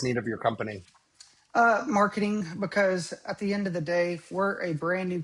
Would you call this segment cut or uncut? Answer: uncut